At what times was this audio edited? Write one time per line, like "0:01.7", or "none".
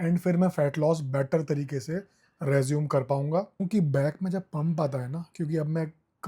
0:03.6